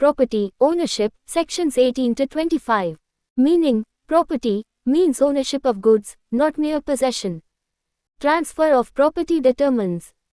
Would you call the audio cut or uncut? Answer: uncut